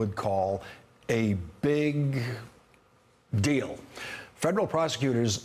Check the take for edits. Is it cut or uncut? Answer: cut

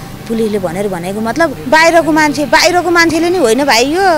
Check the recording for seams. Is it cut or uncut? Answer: cut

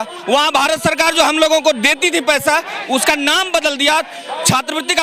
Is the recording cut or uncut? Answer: uncut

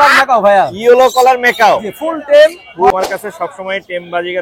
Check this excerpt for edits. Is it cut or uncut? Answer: cut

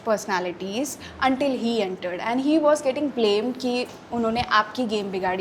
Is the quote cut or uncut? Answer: uncut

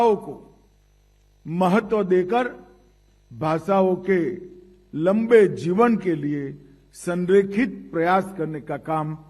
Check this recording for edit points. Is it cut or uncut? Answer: uncut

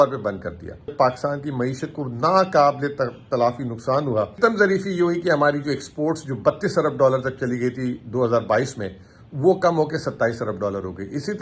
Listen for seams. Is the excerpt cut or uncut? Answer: cut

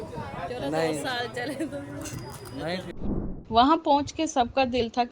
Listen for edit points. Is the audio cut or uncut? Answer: cut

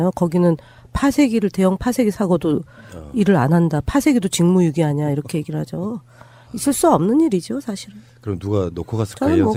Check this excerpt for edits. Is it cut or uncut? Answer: uncut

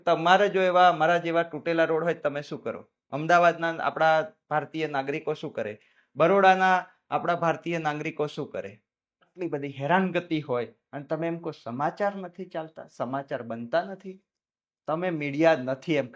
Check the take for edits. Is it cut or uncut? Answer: cut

